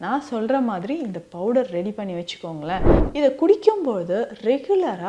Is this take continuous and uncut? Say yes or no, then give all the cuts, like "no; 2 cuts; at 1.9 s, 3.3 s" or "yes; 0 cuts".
no; 1 cut; at 3.0 s